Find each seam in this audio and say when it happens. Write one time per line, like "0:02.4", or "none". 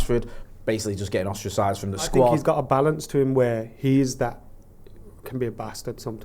0:02.4